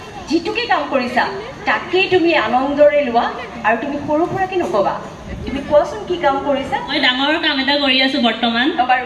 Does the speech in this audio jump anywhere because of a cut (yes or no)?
yes